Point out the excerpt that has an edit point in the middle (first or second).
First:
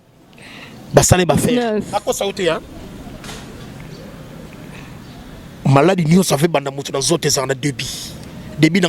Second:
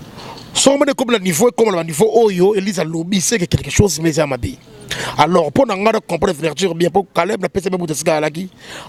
first